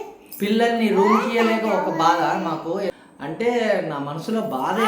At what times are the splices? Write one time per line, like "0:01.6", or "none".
0:03.0